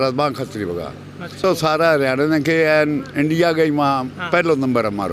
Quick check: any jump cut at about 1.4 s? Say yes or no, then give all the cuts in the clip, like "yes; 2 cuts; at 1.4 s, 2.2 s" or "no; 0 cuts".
yes; 1 cut; at 1.4 s